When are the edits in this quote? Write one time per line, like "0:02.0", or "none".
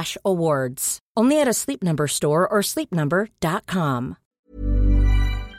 0:04.2